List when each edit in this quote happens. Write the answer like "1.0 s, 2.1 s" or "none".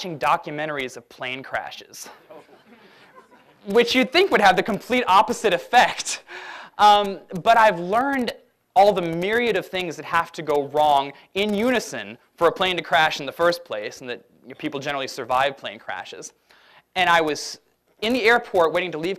3.6 s